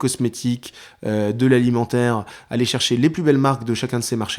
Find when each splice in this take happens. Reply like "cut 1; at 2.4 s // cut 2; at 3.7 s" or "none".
none